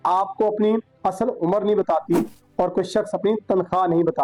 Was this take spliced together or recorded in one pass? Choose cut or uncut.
uncut